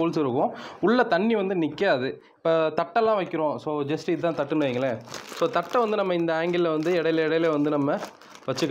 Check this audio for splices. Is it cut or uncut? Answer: uncut